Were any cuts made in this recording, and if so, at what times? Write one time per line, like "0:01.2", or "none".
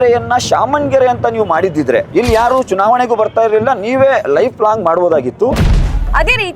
0:02.1
0:05.7

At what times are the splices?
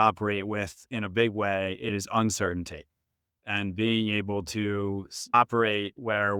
0:01.9
0:05.3

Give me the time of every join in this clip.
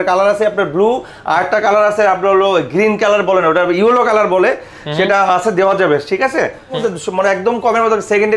0:06.8

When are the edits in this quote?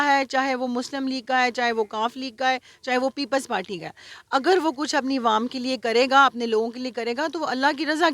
none

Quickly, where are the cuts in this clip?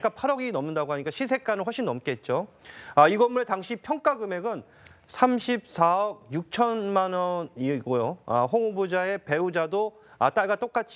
none

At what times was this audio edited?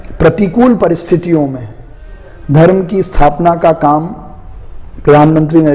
none

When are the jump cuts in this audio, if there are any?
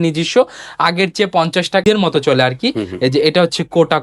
0:01.8

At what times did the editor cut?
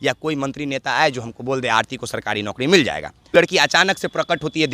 0:03.3

